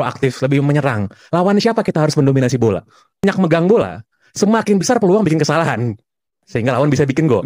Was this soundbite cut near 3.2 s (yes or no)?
yes